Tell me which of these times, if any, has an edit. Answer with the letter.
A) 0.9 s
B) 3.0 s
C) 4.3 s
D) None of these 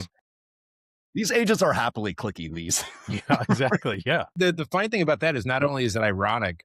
C